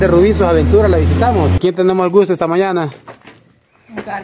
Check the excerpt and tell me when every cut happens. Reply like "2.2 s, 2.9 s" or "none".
1.6 s